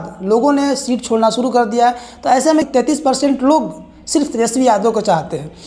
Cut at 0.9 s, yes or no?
no